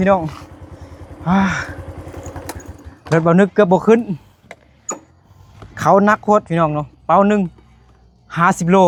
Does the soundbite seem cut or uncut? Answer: uncut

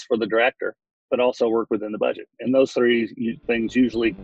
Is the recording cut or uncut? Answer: uncut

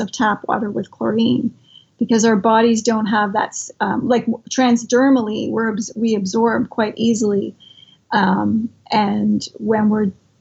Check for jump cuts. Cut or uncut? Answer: uncut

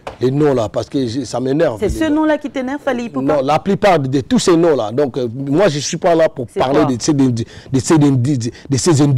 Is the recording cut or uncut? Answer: uncut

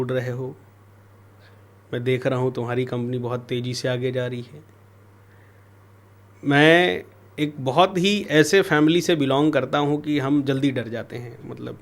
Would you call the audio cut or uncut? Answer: uncut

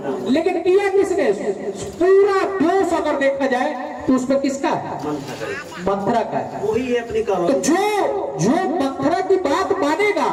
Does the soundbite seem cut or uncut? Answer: uncut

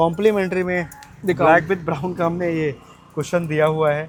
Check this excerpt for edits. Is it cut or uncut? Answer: uncut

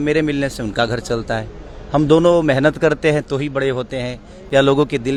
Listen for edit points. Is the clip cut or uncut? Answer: uncut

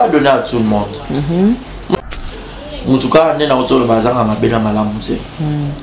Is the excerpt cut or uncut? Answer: cut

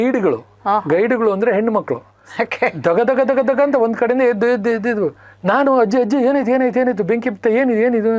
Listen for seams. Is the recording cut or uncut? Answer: cut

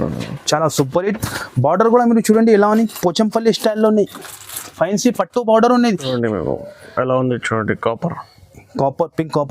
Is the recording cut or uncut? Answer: cut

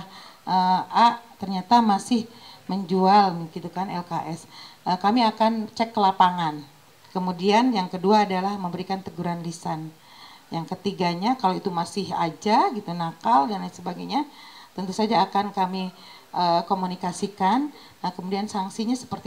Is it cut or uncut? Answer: uncut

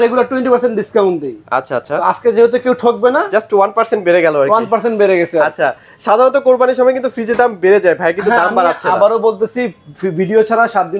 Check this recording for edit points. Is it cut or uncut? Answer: uncut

